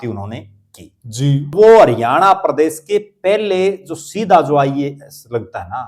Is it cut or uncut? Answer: cut